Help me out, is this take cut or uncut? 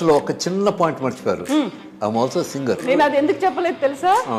cut